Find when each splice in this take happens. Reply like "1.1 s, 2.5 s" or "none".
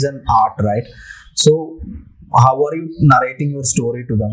none